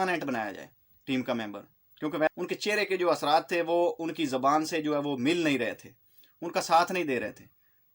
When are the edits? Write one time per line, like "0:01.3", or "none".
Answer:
0:02.3